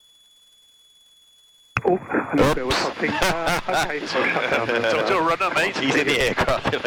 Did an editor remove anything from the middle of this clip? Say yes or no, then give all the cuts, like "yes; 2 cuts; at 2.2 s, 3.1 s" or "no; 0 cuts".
no; 0 cuts